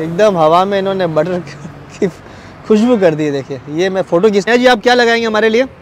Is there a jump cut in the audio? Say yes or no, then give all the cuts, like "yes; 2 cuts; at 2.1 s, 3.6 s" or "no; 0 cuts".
yes; 1 cut; at 4.4 s